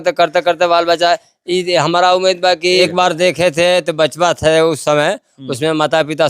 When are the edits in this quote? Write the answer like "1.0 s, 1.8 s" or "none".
2.9 s

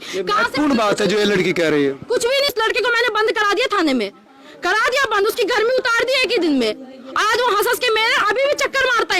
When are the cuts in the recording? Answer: 2.5 s

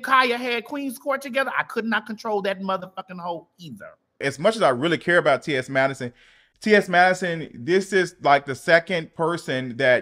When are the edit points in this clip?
4.2 s

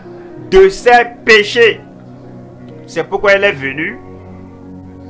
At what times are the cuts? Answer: 4.2 s

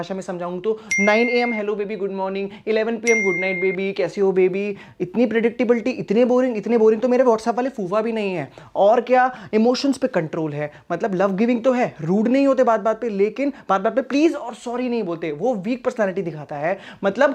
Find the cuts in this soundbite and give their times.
none

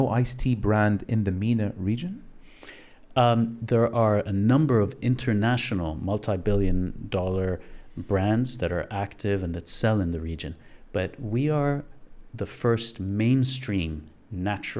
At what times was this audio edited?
none

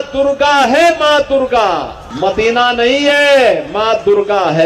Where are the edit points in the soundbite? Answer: 2.1 s

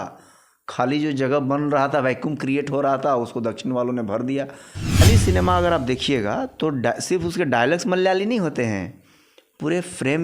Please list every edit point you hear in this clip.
5.0 s

